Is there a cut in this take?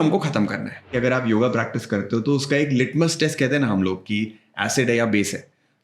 yes; 1 cut; at 0.9 s

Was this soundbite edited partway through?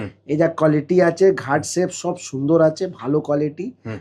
no; 0 cuts

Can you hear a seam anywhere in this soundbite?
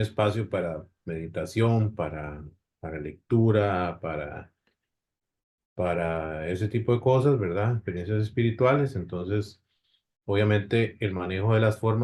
no; 0 cuts

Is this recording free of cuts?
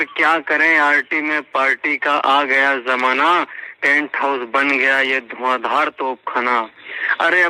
yes; 0 cuts

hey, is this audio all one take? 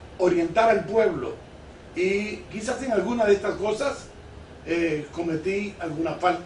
yes; 0 cuts

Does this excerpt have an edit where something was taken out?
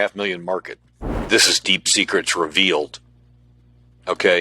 yes; 1 cut; at 1.0 s

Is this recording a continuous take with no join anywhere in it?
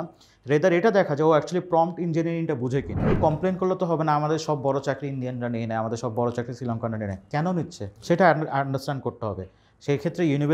no; 2 cuts; at 3.2 s, 7.9 s

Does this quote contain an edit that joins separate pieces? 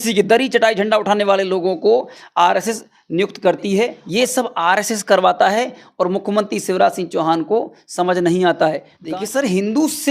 yes; 2 cuts; at 4.0 s, 8.9 s

